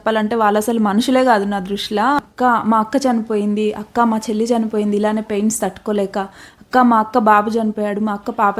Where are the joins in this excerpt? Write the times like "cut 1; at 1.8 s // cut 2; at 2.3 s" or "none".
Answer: cut 1; at 2.3 s